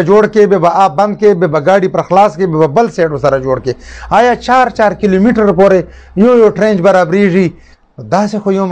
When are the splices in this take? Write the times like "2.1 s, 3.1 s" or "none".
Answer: 7.7 s